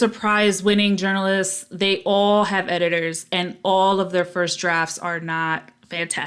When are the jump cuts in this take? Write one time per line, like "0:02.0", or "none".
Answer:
none